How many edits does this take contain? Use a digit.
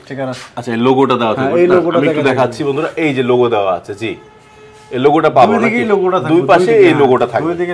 0